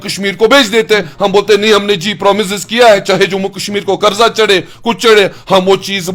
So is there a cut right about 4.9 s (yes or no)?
no